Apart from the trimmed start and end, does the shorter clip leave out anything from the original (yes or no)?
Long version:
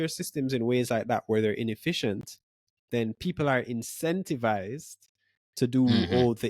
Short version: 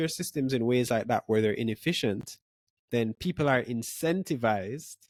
no